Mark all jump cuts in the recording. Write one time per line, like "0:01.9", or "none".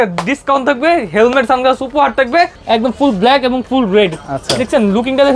0:02.6